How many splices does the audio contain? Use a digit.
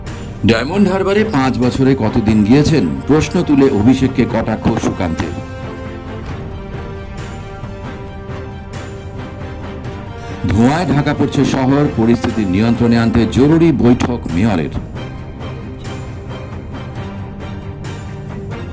0